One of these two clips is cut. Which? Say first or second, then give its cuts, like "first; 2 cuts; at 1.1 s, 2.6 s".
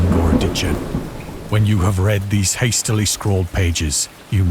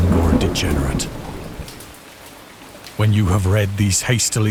first; 1 cut; at 1.3 s